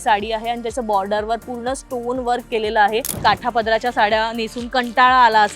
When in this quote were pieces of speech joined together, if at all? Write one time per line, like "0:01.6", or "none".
0:03.1